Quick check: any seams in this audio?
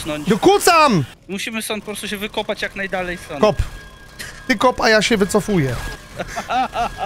yes; 2 cuts; at 1.2 s, 6.0 s

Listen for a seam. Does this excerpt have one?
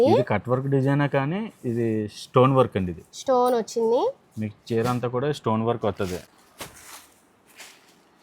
yes; 1 cut; at 6.3 s

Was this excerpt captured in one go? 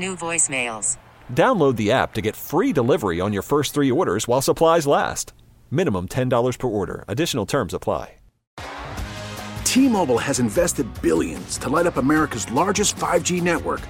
no; 1 cut; at 8.5 s

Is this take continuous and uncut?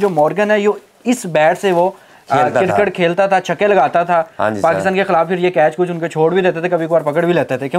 yes; 0 cuts

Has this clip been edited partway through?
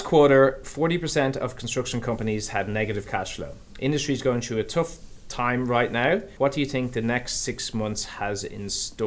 no; 0 cuts

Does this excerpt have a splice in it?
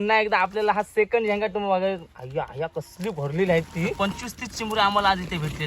yes; 1 cut; at 3.9 s

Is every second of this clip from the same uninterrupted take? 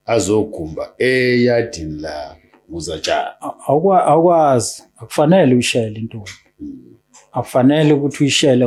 yes; 0 cuts

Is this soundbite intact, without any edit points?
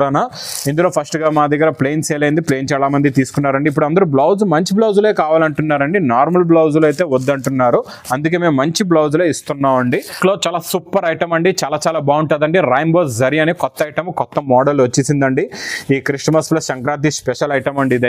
no; 1 cut; at 10.2 s

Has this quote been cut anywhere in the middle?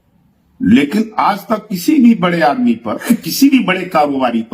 yes; 1 cut; at 3.0 s

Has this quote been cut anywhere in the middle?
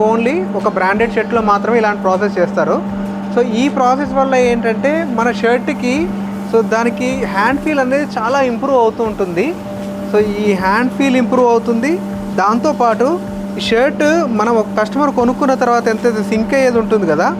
no; 0 cuts

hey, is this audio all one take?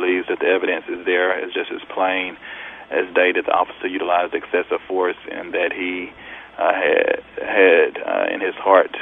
yes; 0 cuts

